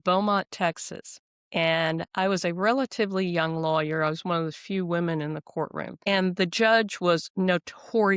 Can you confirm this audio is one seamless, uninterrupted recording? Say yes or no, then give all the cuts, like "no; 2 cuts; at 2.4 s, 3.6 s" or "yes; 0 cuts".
no; 1 cut; at 5.9 s